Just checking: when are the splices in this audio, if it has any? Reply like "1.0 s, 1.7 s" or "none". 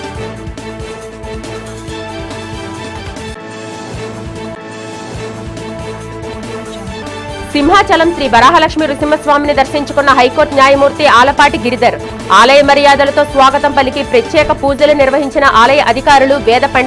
1.9 s